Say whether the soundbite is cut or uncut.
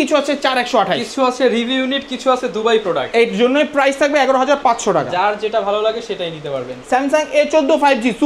uncut